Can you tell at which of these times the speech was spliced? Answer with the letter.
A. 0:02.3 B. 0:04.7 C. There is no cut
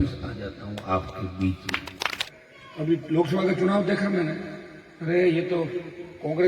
A